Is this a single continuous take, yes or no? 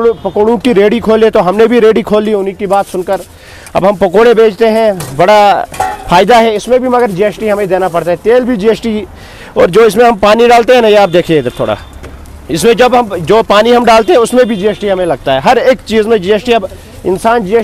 yes